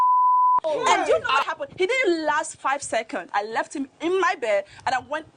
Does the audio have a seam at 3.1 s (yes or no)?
no